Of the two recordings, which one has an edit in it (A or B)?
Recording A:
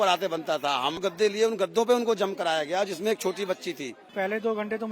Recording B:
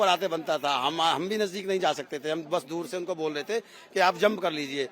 A